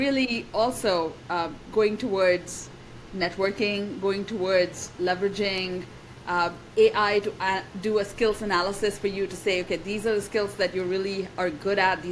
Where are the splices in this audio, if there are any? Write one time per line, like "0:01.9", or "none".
none

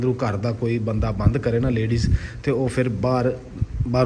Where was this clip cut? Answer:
none

